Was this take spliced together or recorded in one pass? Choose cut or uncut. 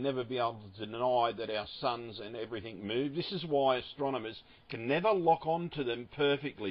uncut